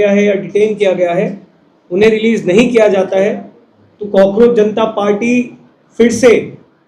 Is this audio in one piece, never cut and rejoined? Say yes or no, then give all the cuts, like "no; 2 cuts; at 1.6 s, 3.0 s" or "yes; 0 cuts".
yes; 0 cuts